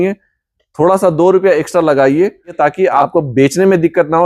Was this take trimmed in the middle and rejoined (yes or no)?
yes